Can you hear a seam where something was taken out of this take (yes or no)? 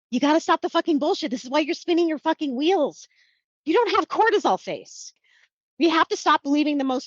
yes